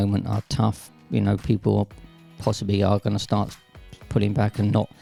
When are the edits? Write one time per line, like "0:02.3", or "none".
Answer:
none